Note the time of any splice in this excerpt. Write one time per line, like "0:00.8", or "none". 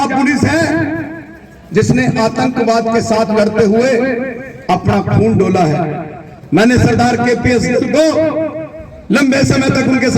none